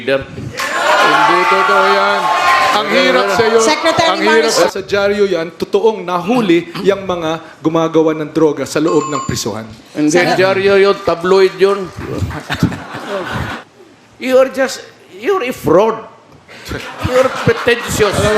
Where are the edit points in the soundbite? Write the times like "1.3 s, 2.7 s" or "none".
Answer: 4.5 s, 13.6 s